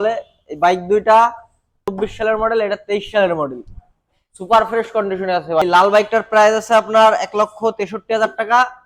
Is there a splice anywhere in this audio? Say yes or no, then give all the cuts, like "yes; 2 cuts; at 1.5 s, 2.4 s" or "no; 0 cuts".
yes; 2 cuts; at 1.9 s, 5.6 s